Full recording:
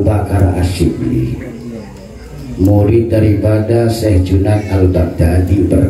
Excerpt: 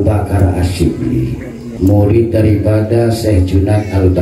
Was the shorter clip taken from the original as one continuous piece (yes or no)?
no